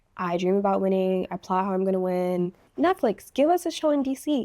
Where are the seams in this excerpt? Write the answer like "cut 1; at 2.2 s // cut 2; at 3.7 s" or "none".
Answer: cut 1; at 2.7 s